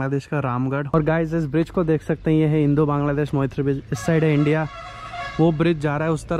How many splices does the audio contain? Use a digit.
1